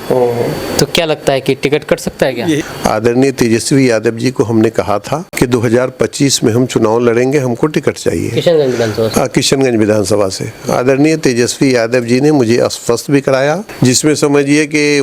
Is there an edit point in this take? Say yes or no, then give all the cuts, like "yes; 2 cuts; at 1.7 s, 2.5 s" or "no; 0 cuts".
yes; 3 cuts; at 2.6 s, 5.3 s, 13.7 s